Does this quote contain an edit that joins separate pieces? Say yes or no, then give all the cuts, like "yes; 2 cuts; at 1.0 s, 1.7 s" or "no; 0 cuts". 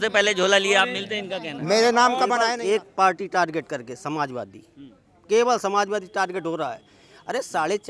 yes; 1 cut; at 2.3 s